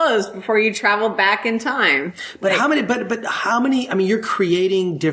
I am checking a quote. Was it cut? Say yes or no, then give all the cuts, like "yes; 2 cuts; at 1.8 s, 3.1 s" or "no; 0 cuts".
no; 0 cuts